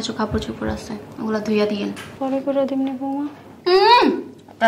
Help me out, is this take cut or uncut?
cut